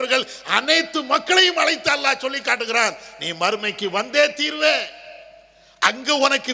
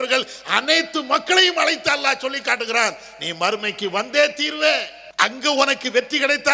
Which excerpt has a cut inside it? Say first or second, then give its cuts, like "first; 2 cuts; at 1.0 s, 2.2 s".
second; 1 cut; at 5.0 s